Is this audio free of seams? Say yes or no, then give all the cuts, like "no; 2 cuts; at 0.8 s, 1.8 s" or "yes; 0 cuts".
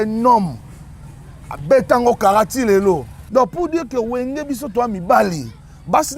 no; 1 cut; at 3.1 s